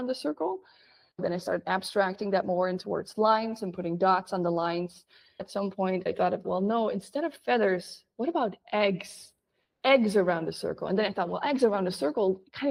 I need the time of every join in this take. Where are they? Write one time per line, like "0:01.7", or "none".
none